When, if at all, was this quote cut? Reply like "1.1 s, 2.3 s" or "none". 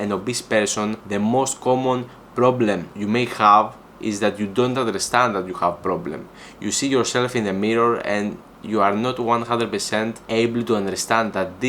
1.0 s, 2.9 s, 10.2 s